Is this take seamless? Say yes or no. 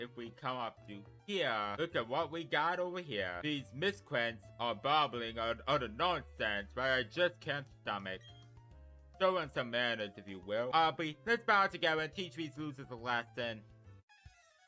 no